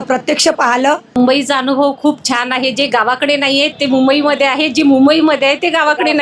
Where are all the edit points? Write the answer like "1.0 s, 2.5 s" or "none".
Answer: 1.2 s